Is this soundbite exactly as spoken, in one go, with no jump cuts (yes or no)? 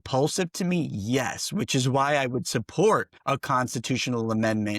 no